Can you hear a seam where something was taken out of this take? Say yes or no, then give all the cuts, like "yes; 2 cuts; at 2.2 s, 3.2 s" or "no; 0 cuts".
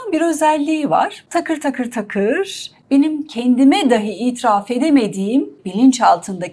yes; 2 cuts; at 1.2 s, 5.6 s